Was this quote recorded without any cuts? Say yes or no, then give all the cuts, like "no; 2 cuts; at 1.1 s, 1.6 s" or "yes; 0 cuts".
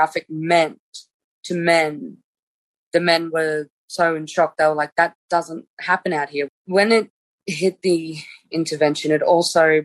no; 1 cut; at 6.6 s